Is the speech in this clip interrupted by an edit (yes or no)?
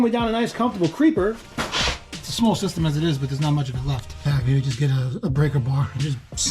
yes